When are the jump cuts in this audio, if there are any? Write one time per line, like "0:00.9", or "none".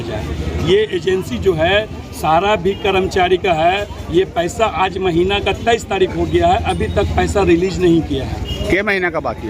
none